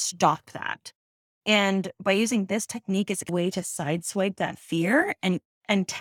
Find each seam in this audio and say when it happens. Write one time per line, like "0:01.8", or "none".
0:03.3